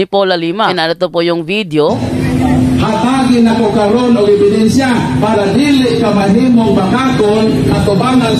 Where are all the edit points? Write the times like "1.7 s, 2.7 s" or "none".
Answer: 0.7 s, 2.0 s